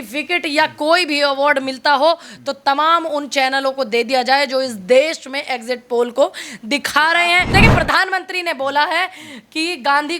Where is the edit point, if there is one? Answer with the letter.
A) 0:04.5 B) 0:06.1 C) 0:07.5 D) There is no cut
C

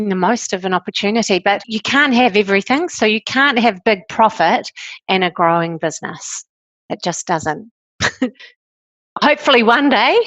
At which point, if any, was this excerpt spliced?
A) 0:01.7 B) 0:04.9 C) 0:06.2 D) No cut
A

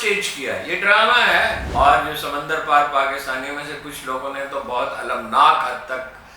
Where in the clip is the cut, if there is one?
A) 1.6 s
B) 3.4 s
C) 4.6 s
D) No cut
A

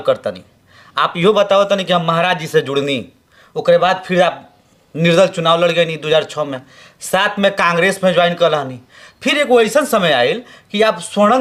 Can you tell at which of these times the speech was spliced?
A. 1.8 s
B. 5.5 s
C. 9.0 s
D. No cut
D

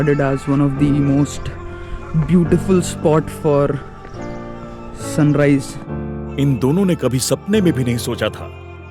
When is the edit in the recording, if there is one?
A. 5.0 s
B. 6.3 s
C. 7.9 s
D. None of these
B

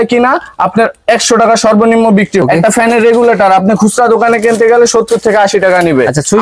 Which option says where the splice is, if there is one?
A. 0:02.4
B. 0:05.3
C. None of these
A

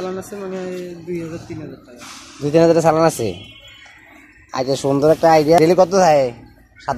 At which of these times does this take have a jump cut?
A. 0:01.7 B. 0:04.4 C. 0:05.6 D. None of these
C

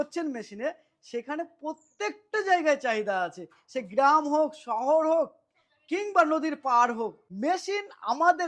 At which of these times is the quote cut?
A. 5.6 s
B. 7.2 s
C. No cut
B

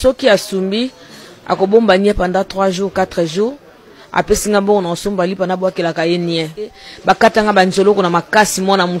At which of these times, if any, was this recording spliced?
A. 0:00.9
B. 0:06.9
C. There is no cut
B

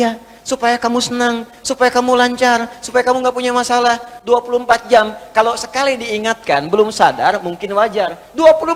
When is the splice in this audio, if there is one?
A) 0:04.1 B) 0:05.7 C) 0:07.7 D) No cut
D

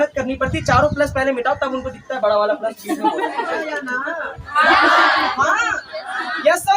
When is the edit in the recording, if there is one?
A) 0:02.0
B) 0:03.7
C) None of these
B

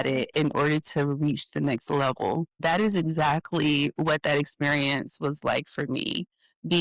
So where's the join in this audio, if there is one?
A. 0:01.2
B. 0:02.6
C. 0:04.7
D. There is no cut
B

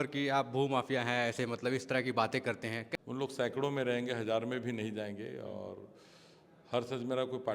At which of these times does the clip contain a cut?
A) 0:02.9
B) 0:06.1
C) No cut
A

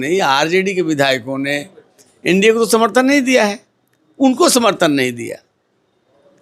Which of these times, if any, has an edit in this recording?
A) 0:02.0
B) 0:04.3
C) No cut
C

